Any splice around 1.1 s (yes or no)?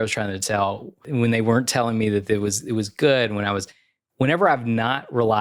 yes